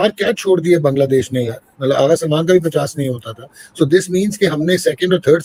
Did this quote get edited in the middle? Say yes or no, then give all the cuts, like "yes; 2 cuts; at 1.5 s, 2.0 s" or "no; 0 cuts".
no; 0 cuts